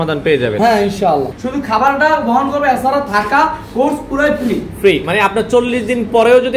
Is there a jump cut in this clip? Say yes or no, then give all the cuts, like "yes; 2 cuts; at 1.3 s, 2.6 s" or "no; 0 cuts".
yes; 1 cut; at 1.4 s